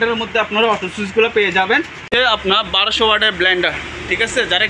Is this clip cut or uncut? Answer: cut